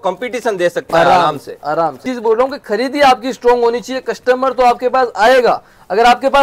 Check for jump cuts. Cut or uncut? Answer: cut